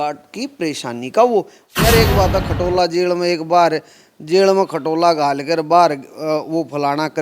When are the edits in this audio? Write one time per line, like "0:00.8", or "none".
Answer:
0:01.6